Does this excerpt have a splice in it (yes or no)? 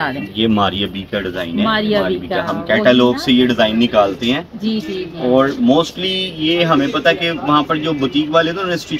no